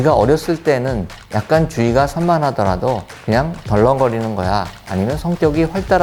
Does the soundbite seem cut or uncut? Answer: uncut